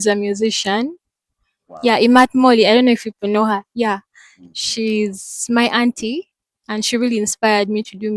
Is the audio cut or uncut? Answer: uncut